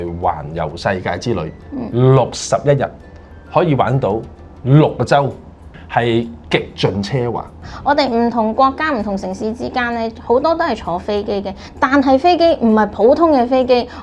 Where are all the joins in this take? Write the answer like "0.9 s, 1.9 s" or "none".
none

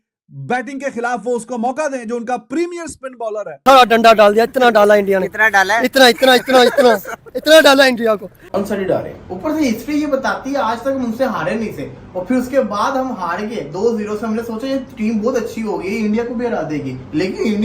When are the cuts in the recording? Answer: 3.6 s, 8.4 s

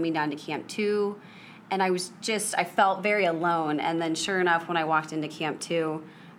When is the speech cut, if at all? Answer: none

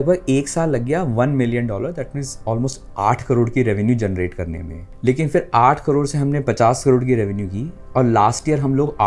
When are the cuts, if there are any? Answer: none

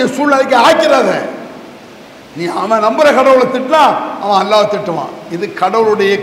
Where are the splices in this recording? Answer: none

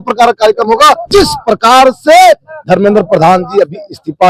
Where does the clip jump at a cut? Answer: 1.1 s

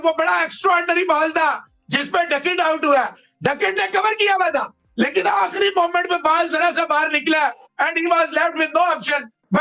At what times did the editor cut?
none

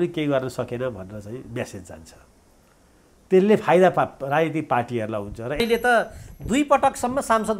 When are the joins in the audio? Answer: 5.6 s

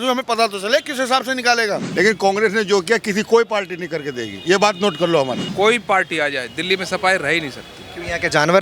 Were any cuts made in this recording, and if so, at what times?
1.9 s, 5.4 s

